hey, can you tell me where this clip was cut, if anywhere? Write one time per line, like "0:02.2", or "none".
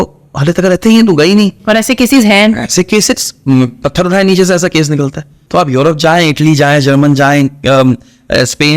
0:05.4

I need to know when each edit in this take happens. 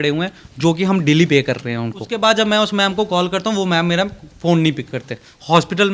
0:02.1

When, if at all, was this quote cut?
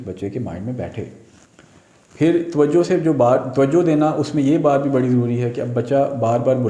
none

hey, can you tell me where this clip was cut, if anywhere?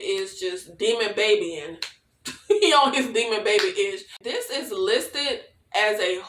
0:04.2

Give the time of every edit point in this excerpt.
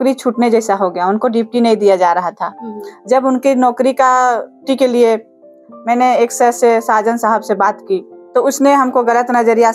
0:04.6
0:08.2

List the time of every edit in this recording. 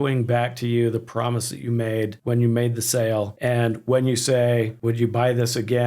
0:02.2
0:03.3
0:04.7

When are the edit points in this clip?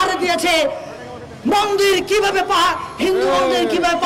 none

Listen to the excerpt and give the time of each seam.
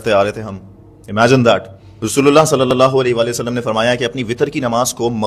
0:02.0

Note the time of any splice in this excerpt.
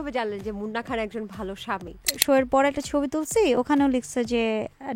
0:02.1

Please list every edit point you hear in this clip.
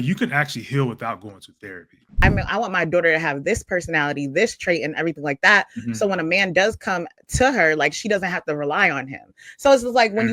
0:02.2

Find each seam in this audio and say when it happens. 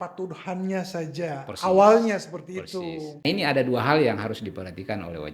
0:03.2

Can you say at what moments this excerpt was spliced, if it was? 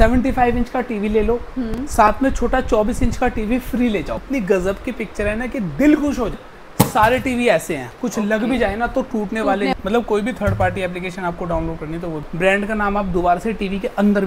0:04.2
0:06.4
0:09.7
0:12.2

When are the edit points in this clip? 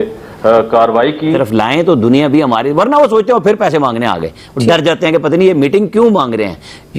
0:01.4

